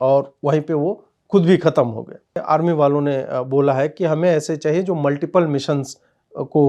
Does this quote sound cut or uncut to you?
cut